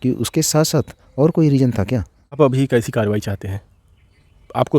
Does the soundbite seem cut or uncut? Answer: cut